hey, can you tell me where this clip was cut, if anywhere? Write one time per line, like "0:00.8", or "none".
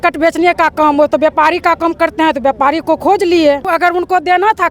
0:03.7